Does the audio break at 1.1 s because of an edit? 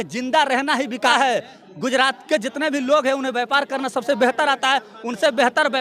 yes; 1 cut; at 1.1 s

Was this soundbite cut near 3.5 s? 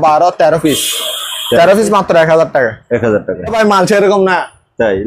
yes; 1 cut; at 3.5 s

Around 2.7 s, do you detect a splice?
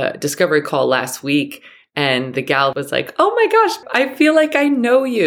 yes; 2 cuts; at 2.7 s, 3.8 s

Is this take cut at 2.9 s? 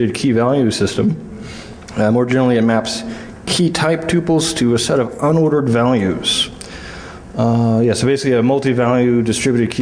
no; 1 cut; at 4.4 s

